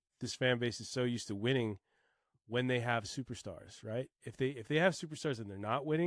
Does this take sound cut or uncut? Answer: uncut